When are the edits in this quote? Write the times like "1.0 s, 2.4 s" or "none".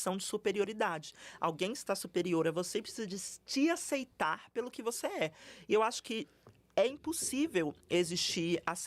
none